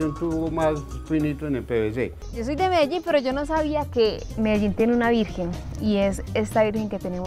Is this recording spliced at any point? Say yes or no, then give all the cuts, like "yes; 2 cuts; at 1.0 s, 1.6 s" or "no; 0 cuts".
yes; 1 cut; at 2.3 s